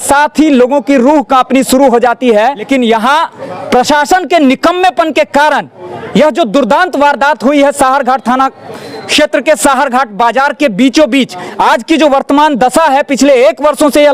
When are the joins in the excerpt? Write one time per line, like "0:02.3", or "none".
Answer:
0:02.7
0:11.4